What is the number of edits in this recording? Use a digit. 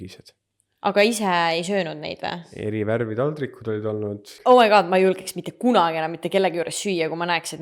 2